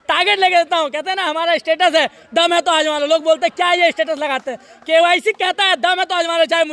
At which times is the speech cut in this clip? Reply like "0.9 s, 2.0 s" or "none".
none